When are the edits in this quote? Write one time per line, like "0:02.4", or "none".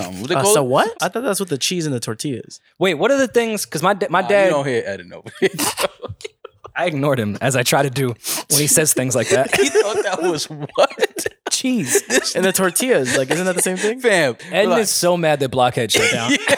0:01.0
0:14.4